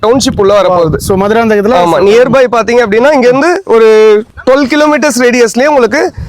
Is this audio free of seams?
no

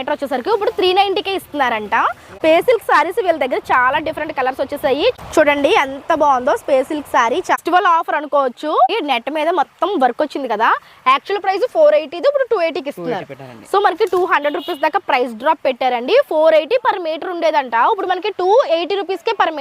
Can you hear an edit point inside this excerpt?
yes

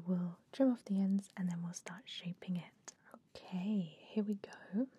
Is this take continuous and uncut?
no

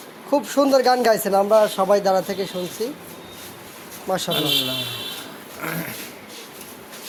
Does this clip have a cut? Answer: no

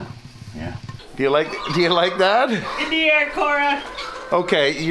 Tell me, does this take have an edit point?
yes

